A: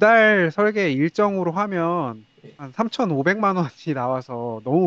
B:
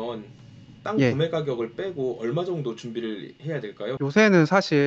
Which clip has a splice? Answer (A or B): B